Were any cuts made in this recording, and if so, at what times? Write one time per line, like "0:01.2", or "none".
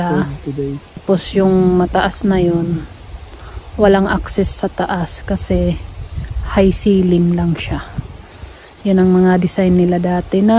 0:01.0